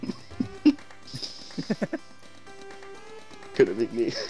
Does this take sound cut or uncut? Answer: uncut